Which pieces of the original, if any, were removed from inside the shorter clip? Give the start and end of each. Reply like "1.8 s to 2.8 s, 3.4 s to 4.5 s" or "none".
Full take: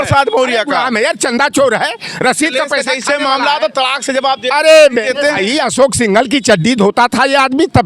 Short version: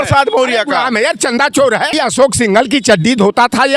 1.9 s to 5.5 s